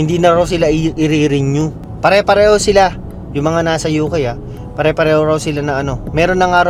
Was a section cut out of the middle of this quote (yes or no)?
no